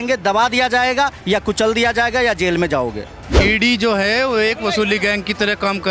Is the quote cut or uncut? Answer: uncut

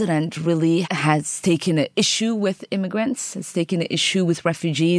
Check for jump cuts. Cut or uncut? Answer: cut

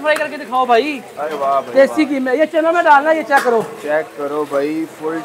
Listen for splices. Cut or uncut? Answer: uncut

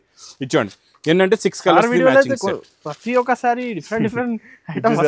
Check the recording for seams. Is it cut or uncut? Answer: uncut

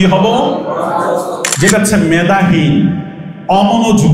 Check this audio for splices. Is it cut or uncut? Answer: cut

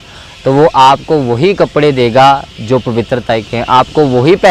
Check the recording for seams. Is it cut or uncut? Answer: uncut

